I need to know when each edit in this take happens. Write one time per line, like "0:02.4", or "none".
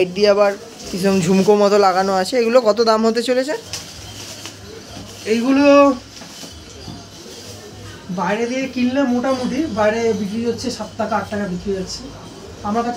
none